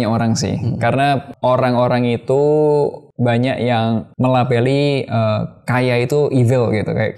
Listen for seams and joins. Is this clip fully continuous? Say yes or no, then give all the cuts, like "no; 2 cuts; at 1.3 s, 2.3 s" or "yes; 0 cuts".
no; 3 cuts; at 1.3 s, 3.0 s, 4.1 s